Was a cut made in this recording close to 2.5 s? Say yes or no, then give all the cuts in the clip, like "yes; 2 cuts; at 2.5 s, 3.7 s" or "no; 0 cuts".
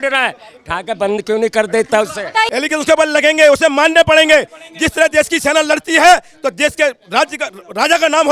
yes; 1 cut; at 2.5 s